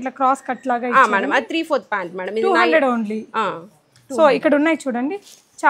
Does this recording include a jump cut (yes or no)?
no